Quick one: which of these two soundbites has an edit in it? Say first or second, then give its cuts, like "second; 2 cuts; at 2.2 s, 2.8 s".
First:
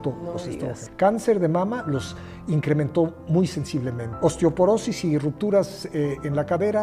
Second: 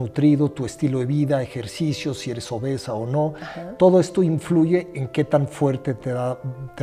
first; 2 cuts; at 0.8 s, 4.0 s